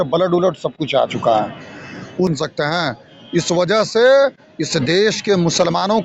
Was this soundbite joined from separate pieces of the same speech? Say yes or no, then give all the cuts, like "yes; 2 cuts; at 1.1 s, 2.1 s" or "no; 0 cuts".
yes; 1 cut; at 2.3 s